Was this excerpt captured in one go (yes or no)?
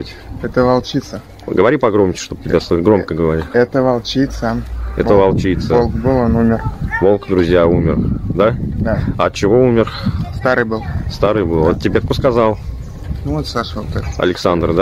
yes